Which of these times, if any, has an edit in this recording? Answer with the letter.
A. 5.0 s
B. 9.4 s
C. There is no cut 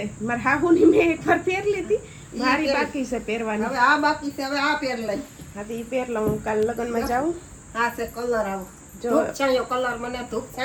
C